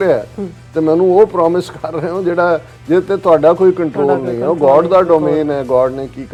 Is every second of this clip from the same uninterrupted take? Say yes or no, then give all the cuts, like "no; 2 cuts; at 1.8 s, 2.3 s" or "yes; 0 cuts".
yes; 0 cuts